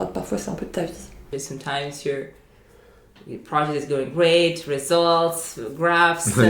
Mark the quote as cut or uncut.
cut